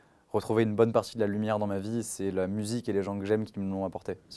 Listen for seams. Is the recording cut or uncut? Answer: uncut